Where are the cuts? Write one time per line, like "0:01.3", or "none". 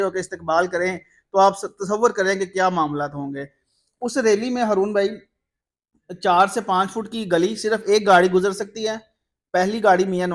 none